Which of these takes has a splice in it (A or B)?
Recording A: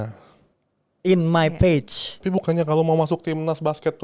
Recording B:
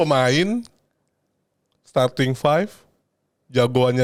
A